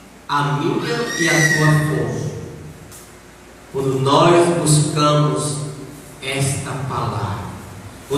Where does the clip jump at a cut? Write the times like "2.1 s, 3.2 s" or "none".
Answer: none